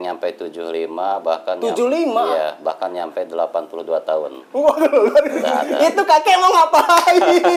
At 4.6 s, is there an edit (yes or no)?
no